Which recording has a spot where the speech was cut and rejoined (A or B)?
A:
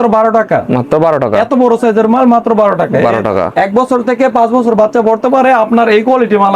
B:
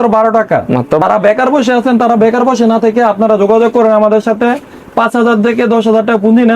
B